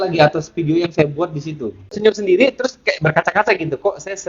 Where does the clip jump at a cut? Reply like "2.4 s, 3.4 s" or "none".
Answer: 1.9 s